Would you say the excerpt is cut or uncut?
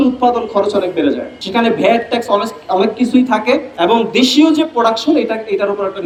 uncut